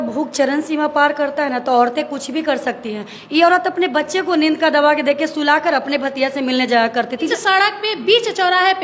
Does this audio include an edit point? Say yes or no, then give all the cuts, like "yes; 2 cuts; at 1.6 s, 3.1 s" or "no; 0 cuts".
yes; 1 cut; at 7.3 s